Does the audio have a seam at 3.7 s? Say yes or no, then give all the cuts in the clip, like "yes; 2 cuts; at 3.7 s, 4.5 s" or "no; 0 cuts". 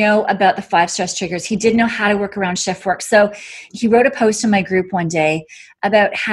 yes; 1 cut; at 3.7 s